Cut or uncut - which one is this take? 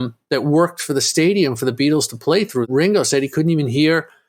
cut